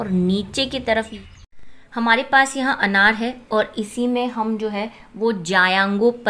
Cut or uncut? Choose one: cut